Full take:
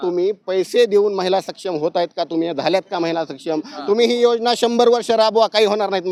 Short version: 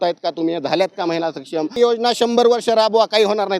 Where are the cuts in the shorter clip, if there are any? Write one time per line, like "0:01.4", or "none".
0:01.8